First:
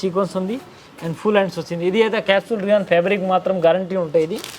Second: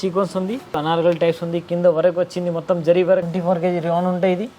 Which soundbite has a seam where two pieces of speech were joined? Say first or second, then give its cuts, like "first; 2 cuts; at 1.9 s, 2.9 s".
second; 2 cuts; at 0.8 s, 3.3 s